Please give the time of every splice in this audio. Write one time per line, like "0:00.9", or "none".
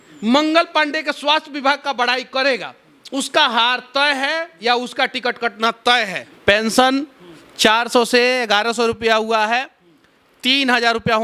0:06.2